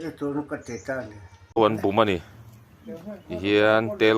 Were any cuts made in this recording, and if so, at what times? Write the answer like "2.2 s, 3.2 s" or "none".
1.6 s